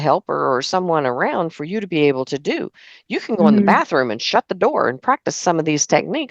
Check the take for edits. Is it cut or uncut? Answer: uncut